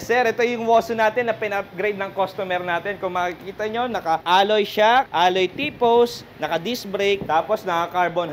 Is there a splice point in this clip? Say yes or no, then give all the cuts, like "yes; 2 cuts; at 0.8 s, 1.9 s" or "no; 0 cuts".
yes; 3 cuts; at 4.2 s, 5.1 s, 7.2 s